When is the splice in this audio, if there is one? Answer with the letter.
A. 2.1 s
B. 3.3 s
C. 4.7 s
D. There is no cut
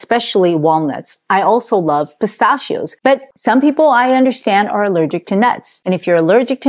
B